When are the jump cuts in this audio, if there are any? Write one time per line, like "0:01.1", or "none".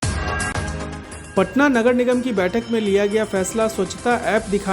0:01.0